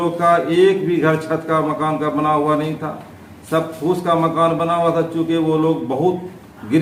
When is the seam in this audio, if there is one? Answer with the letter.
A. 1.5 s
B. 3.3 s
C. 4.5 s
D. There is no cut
D